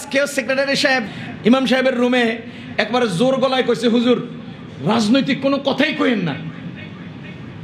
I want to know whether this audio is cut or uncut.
cut